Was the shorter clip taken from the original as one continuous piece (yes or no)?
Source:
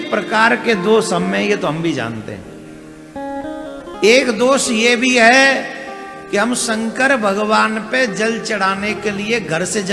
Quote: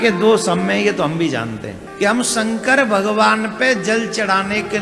no